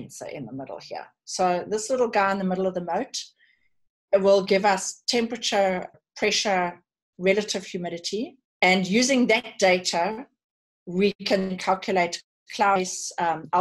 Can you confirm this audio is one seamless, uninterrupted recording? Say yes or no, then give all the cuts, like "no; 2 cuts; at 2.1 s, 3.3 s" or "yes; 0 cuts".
no; 2 cuts; at 6.0 s, 8.4 s